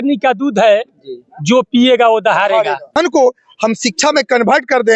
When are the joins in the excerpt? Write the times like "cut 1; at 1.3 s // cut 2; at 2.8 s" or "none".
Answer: cut 1; at 2.9 s